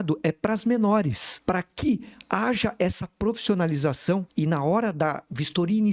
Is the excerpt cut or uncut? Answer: cut